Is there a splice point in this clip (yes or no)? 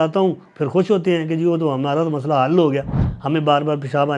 yes